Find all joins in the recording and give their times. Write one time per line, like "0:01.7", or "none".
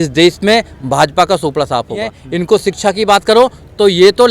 0:02.2